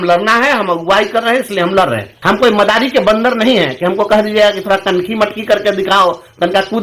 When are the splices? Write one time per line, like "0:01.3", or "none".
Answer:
0:02.1